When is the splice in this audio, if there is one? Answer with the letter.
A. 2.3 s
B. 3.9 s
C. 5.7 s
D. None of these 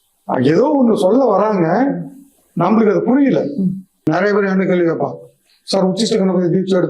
B